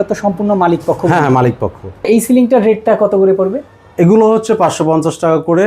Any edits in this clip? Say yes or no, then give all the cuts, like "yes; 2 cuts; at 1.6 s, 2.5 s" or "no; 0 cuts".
yes; 1 cut; at 2.1 s